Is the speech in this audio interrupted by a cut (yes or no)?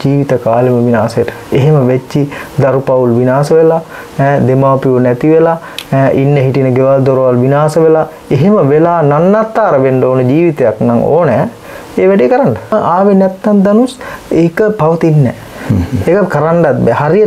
yes